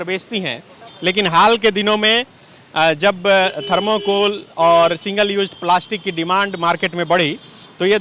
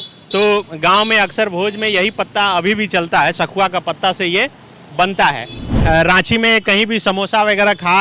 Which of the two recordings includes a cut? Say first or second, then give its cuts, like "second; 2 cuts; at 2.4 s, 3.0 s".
second; 1 cut; at 5.7 s